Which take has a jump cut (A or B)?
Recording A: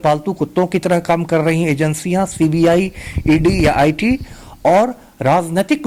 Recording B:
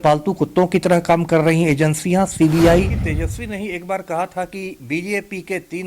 B